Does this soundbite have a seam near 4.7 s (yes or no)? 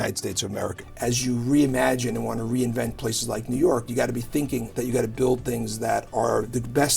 yes